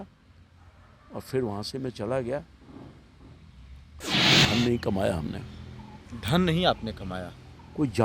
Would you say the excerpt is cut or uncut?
cut